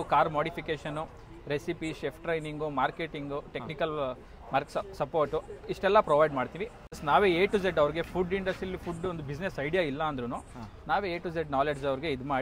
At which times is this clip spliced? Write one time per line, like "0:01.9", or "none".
0:06.9